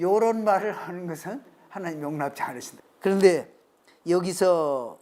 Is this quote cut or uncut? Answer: uncut